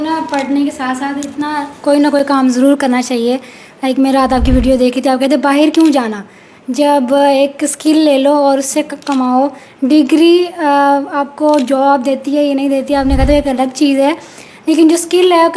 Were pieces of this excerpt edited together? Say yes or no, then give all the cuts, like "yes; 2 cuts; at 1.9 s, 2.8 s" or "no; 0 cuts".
no; 0 cuts